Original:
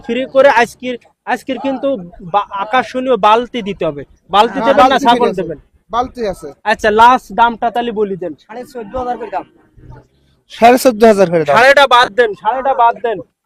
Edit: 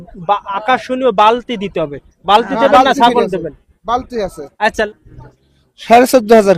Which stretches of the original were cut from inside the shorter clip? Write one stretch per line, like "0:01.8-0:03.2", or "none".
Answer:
0:06.9-0:09.6